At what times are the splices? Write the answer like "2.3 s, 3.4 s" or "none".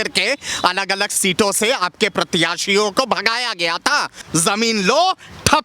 4.2 s

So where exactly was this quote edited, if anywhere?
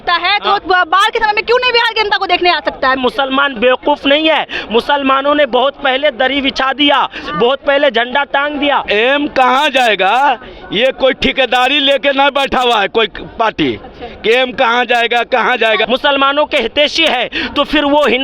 3.0 s, 8.8 s, 15.8 s

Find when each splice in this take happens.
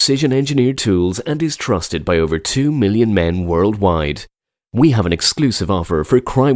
none

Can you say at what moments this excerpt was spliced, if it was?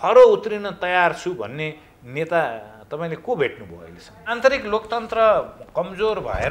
4.2 s

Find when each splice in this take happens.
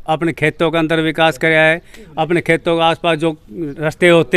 none

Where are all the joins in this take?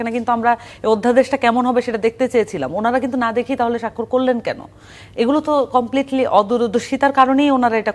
none

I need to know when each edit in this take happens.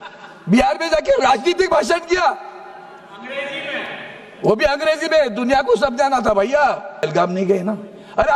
7.0 s

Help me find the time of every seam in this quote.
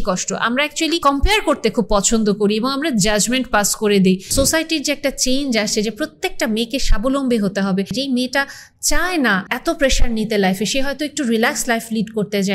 1.0 s, 4.3 s, 7.9 s, 9.5 s

